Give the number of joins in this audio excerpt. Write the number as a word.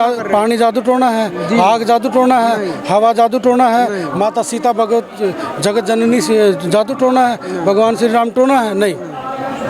zero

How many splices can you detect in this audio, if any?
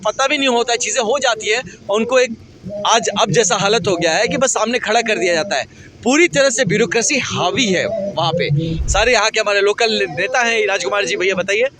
one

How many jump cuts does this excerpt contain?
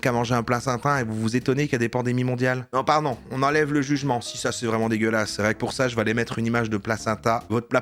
zero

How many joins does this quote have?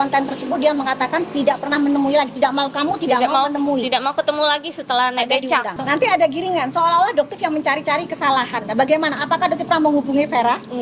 one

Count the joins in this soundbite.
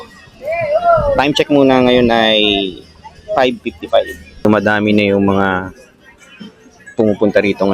one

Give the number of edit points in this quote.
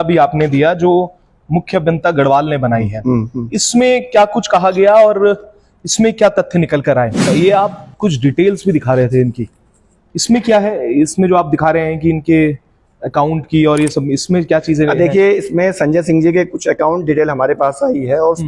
one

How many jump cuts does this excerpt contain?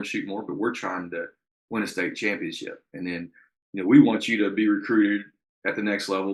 zero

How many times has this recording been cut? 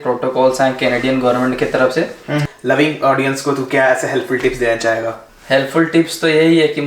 two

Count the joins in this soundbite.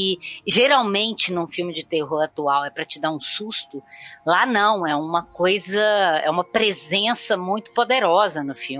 zero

